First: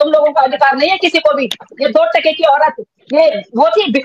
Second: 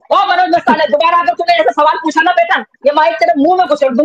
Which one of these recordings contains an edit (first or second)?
first